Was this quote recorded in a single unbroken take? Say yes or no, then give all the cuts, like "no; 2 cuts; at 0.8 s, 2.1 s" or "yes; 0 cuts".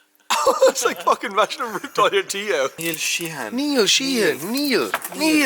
no; 1 cut; at 2.8 s